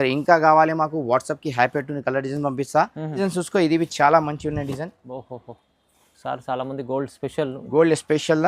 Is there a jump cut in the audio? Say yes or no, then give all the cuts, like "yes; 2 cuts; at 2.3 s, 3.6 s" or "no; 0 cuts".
yes; 1 cut; at 3.2 s